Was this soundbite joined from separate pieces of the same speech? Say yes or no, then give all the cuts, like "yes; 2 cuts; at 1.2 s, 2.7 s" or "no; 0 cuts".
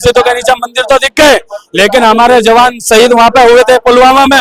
no; 0 cuts